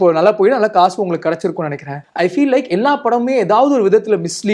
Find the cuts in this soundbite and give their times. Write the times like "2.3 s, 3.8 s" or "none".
2.0 s